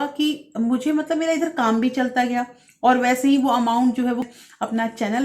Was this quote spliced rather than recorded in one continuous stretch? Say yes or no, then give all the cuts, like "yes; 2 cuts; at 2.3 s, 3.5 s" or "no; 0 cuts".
yes; 1 cut; at 4.2 s